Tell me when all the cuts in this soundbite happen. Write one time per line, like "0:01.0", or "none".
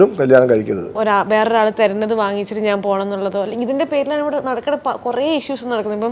0:00.9